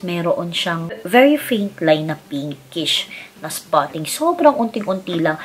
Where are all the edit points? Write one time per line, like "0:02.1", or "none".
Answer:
0:01.0